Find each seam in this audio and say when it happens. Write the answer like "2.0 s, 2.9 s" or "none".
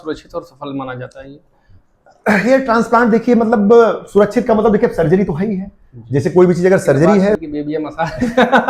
7.4 s